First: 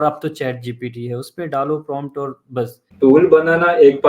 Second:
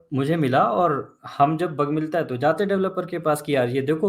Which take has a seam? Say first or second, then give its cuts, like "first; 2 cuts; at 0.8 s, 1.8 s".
first; 1 cut; at 2.9 s